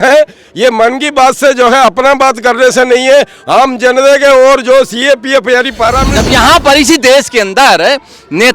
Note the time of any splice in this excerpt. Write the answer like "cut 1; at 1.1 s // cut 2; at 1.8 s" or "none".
cut 1; at 6.1 s